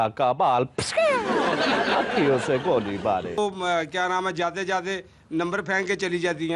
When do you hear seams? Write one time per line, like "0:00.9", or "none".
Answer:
0:03.4